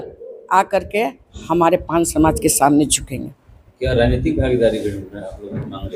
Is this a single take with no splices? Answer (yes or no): yes